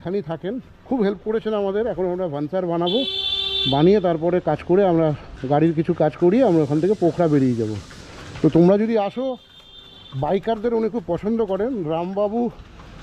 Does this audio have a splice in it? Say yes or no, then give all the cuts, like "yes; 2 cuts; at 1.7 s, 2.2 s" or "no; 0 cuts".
no; 0 cuts